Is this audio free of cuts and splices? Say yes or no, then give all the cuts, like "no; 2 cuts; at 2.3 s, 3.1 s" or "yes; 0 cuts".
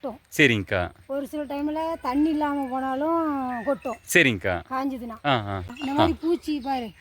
no; 1 cut; at 5.7 s